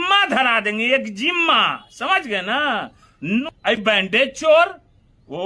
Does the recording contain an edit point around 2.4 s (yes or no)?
no